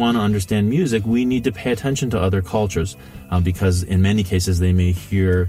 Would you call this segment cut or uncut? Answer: cut